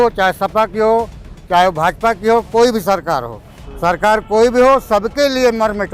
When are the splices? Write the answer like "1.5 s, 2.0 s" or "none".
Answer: none